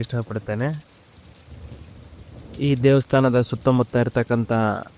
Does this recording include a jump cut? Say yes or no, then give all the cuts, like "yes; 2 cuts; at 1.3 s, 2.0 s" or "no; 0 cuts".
no; 0 cuts